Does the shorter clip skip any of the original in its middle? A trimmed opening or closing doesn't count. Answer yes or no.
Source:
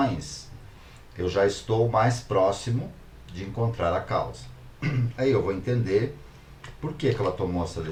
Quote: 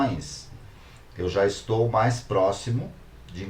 no